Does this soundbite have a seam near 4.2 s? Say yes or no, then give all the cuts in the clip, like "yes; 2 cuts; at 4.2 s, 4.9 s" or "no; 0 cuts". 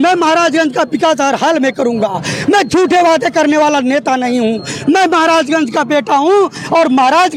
no; 0 cuts